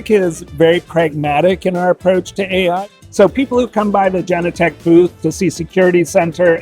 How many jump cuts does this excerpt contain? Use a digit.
1